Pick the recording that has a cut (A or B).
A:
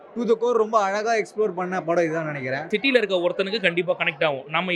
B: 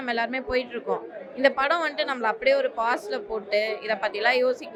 A